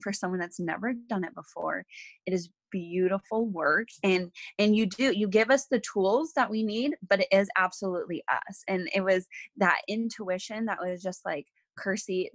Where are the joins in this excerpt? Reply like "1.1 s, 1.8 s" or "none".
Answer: none